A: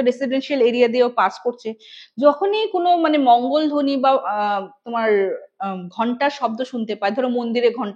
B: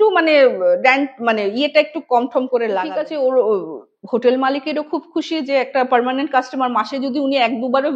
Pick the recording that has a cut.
B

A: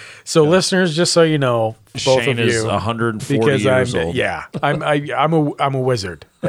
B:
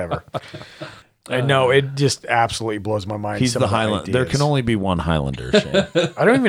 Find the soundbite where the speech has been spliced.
A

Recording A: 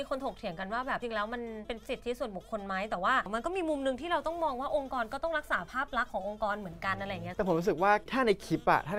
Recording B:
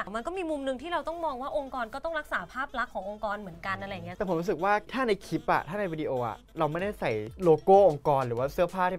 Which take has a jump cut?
A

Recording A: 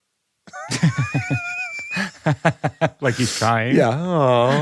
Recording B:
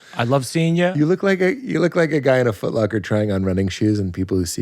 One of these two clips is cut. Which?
B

